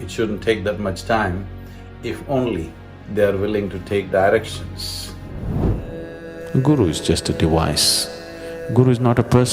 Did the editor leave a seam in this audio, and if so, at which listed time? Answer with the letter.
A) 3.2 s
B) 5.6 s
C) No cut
B